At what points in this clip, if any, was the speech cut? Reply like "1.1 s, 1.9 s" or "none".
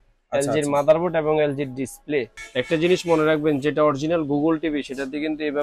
2.4 s